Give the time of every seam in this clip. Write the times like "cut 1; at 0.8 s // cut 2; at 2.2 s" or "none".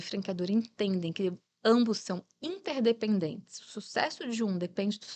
none